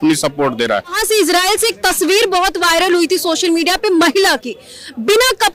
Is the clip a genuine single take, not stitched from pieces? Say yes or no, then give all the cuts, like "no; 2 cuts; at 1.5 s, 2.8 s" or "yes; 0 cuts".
no; 1 cut; at 0.9 s